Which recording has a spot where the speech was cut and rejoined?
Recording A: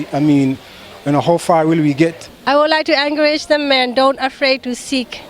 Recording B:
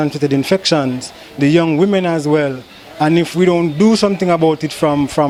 A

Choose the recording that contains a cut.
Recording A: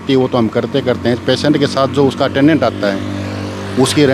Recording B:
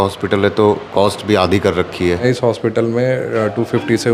B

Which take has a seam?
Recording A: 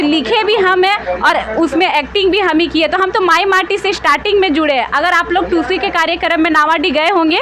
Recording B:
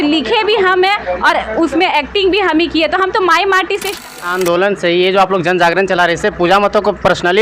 B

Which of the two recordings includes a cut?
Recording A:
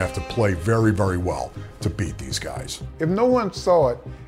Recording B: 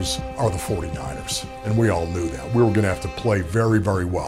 A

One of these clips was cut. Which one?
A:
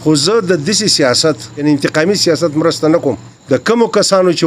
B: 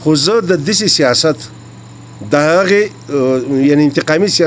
A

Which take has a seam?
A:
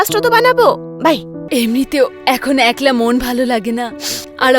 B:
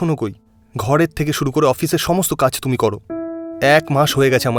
A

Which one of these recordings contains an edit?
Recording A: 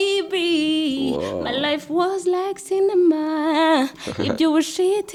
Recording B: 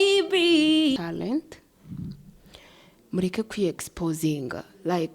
B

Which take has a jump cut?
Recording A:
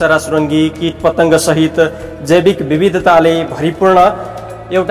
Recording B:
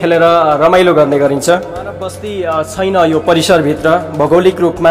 B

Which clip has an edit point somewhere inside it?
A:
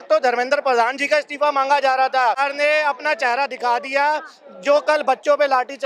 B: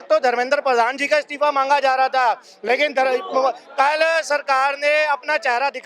A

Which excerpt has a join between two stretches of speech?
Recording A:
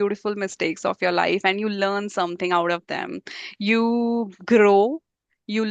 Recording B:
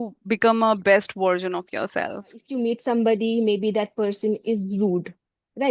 B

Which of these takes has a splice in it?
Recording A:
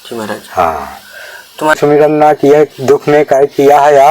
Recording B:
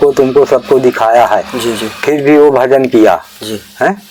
A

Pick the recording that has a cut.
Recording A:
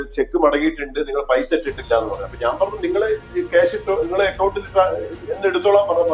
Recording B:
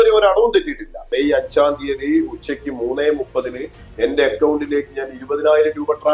B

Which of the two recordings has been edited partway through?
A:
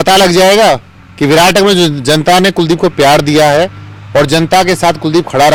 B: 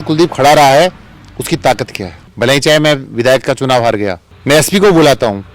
B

